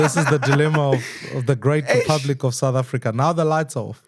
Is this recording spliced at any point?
no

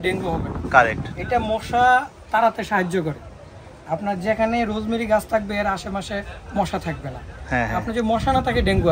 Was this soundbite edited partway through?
no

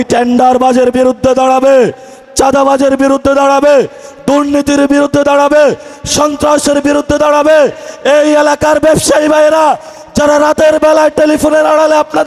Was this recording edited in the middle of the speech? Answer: no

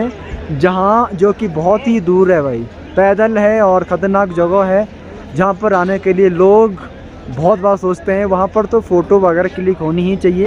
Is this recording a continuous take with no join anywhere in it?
yes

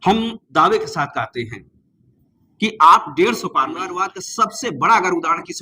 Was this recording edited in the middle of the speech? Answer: yes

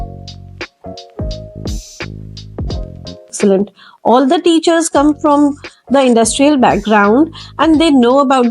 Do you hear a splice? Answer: yes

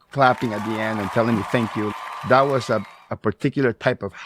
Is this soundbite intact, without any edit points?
no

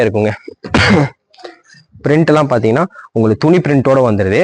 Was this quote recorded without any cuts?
yes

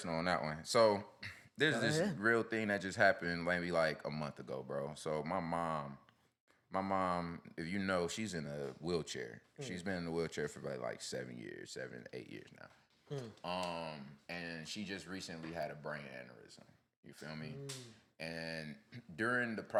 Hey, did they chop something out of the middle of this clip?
no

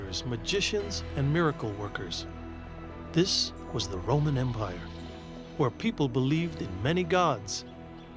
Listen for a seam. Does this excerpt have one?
yes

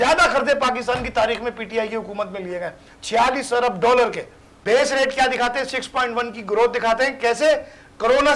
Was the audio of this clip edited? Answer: yes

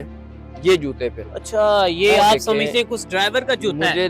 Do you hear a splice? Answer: yes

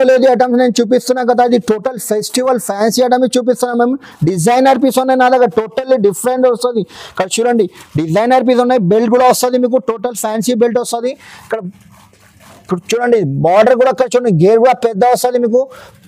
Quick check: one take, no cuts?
yes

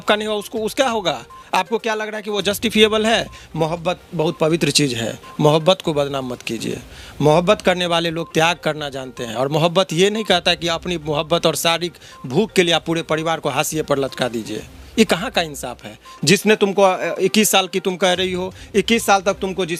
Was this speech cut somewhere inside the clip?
no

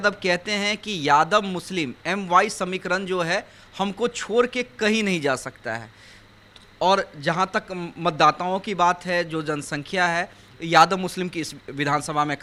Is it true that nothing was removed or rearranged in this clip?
yes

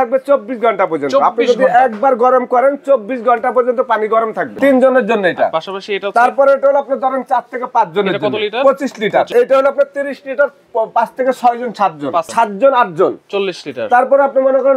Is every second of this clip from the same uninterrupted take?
no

